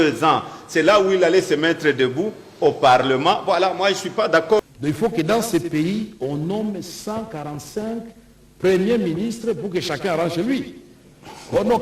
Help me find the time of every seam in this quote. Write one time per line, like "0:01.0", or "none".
0:04.6

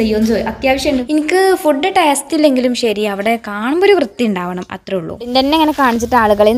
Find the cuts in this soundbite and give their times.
0:01.0
0:05.3

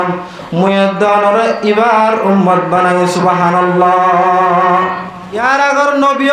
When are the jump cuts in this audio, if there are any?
0:05.4

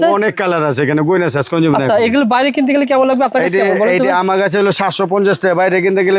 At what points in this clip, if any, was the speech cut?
none

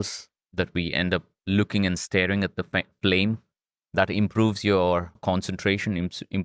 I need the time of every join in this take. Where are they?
0:05.2

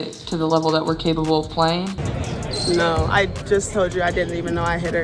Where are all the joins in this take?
0:01.8

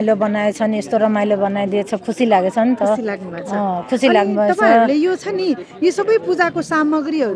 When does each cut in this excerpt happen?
none

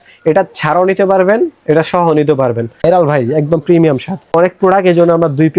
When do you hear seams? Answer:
0:02.7
0:04.3

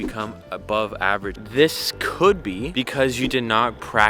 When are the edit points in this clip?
0:01.4

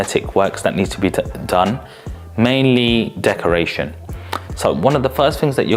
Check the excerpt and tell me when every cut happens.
none

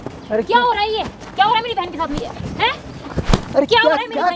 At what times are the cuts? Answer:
none

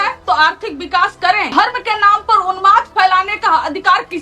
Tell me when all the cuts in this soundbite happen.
0:01.5

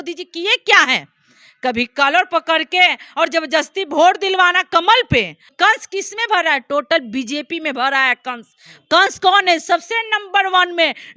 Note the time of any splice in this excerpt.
0:05.5

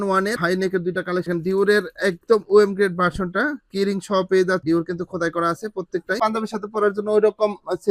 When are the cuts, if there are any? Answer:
0:01.3
0:04.6
0:06.2

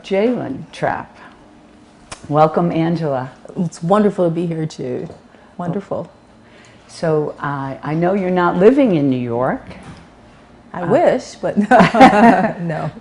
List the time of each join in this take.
0:02.7

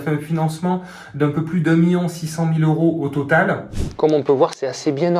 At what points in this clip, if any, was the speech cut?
0:03.7

